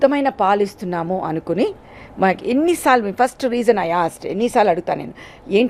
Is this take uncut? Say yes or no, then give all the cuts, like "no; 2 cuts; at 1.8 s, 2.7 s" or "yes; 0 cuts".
yes; 0 cuts